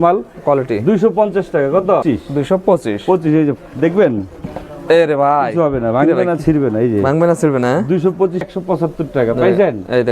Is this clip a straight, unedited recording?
no; 2 cuts; at 2.0 s, 8.5 s

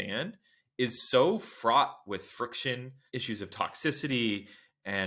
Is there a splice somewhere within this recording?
yes; 1 cut; at 2.9 s

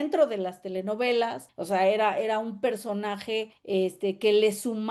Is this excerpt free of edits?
no; 2 cuts; at 1.5 s, 3.6 s

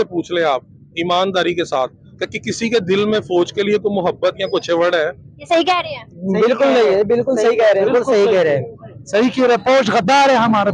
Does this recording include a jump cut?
no; 0 cuts

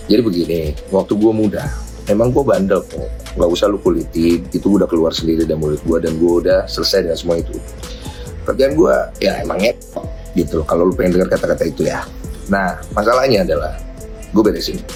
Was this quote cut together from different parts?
no; 0 cuts

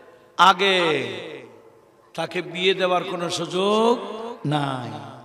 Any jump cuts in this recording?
no; 0 cuts

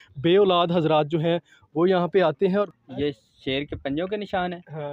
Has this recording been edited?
yes; 1 cut; at 2.7 s

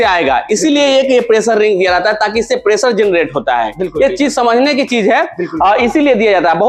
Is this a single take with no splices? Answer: yes; 0 cuts

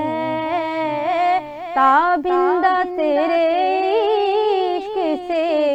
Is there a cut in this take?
no; 0 cuts

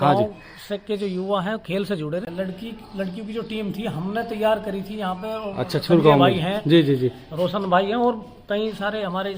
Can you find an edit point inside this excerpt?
yes; 1 cut; at 2.3 s

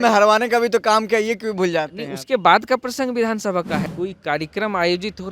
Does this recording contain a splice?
yes; 1 cut; at 3.8 s

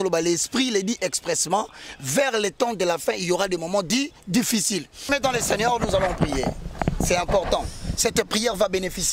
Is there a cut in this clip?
yes; 1 cut; at 5.1 s

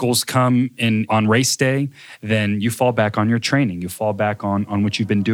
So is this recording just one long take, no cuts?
no; 1 cut; at 1.1 s

